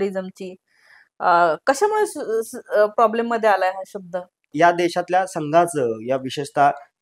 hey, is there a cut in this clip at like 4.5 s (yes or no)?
yes